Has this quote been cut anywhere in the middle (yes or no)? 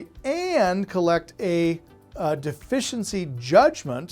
no